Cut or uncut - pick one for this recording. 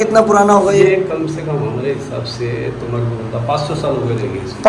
uncut